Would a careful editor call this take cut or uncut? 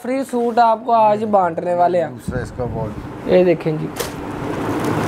uncut